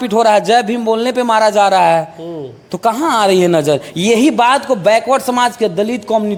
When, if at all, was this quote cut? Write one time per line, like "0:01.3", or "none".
none